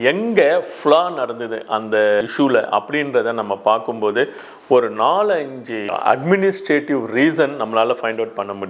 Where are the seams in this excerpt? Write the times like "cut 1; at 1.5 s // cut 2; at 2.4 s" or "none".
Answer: none